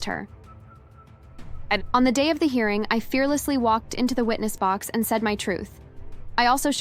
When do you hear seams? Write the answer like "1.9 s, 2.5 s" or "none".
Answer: none